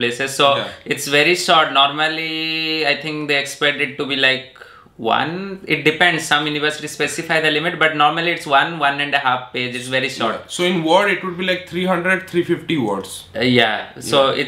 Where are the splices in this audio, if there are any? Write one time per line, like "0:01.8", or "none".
none